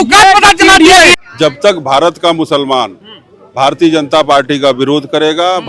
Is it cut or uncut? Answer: cut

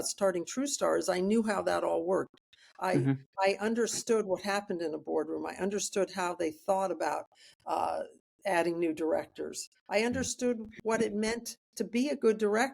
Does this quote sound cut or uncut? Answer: uncut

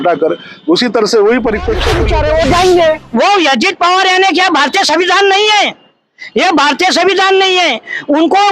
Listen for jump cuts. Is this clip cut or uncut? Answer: cut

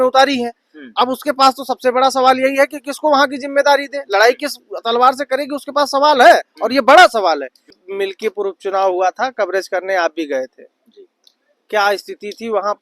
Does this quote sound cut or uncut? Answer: cut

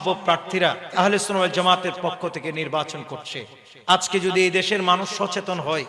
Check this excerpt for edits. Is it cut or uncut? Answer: cut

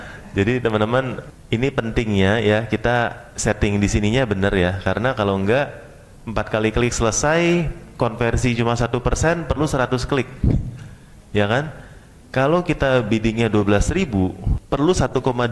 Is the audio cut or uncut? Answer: cut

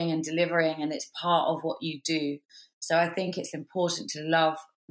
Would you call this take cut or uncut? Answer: uncut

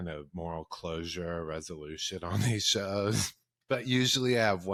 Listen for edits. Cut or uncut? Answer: uncut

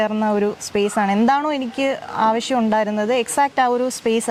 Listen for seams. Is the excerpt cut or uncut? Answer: uncut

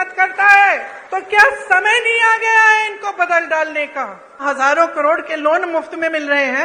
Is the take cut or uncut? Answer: cut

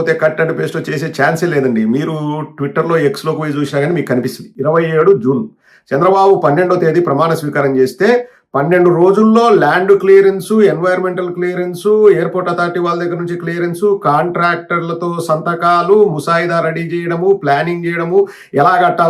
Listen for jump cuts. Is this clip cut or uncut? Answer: cut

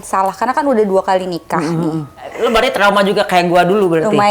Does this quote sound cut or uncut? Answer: cut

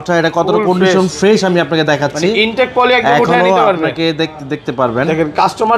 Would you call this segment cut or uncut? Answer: uncut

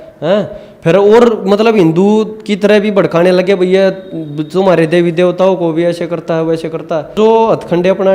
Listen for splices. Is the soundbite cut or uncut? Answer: cut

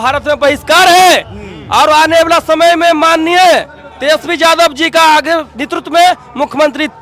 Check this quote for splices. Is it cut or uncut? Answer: uncut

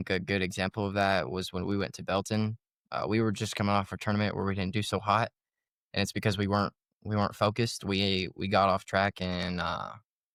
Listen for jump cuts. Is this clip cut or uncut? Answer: uncut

